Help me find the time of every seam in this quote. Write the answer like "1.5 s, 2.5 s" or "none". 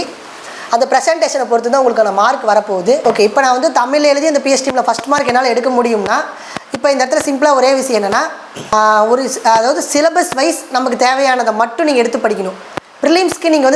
3.0 s, 8.7 s